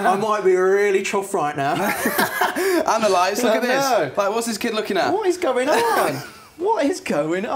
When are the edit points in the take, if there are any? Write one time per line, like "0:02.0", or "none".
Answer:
none